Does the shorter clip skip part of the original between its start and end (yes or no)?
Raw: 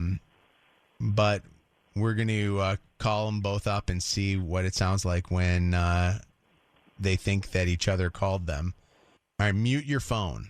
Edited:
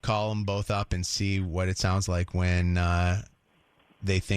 no